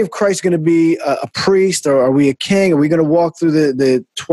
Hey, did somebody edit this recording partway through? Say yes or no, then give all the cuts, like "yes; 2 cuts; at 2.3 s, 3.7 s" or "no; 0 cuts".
no; 0 cuts